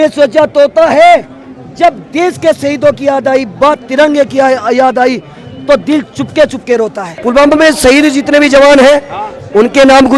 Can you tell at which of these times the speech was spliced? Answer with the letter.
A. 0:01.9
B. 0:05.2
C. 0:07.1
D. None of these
C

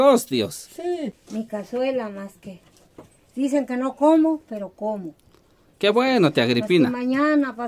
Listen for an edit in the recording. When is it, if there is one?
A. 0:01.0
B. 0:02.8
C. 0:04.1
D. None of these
A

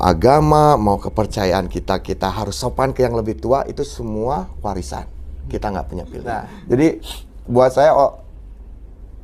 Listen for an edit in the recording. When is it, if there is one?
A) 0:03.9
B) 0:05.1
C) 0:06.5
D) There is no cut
C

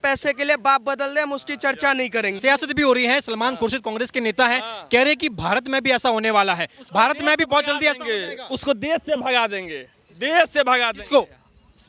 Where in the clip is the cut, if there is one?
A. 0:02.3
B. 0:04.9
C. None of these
A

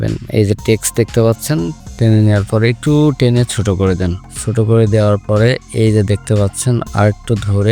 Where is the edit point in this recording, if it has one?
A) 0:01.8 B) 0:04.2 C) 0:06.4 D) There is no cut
A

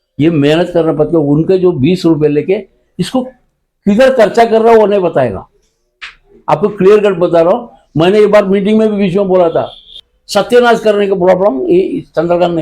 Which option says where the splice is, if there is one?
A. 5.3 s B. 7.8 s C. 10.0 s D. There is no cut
C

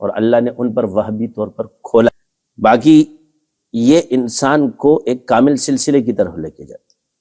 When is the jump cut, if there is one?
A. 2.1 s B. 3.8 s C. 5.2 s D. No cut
A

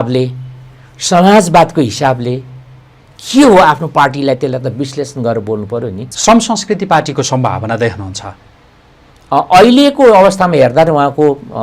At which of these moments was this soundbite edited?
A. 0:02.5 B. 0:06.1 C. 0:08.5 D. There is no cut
B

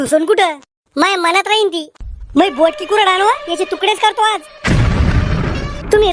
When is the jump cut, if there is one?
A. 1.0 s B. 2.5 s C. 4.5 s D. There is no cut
D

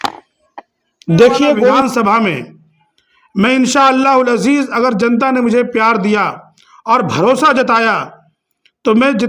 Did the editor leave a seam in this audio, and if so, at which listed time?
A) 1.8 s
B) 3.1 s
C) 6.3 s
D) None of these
A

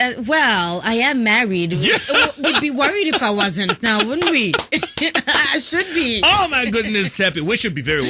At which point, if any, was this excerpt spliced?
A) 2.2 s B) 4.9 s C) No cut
C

